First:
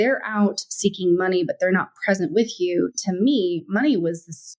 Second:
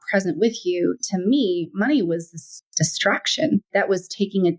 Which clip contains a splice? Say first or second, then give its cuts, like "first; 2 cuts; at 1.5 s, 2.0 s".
second; 1 cut; at 3.7 s